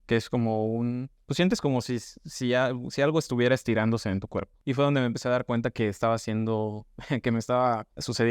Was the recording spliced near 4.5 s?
yes; 1 cut; at 4.5 s

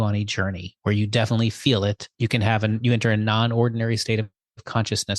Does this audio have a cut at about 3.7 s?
no; 1 cut; at 2.1 s

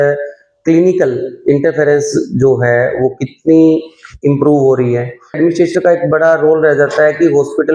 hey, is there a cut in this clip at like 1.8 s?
no; 1 cut; at 5.4 s

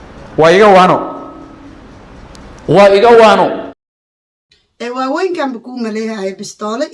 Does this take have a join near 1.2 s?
no; 0 cuts

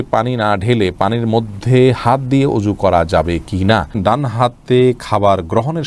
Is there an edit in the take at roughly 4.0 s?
yes; 1 cut; at 4.0 s

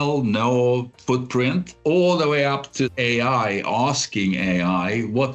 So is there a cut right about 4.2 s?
no; 2 cuts; at 1.7 s, 2.9 s

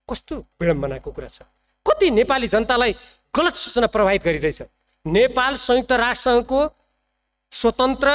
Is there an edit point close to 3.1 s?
no; 0 cuts

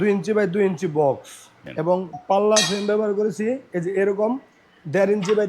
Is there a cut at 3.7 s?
no; 1 cut; at 1.6 s

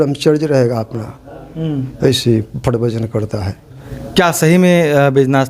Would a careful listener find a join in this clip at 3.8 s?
yes; 1 cut; at 3.8 s

